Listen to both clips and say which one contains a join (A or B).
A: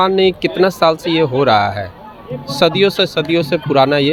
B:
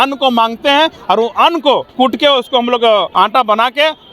B